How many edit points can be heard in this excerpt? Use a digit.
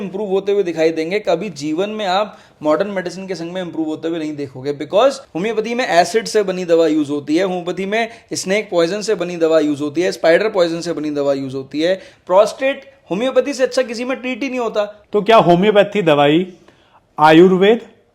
3